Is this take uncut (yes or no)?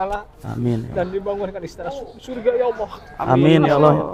yes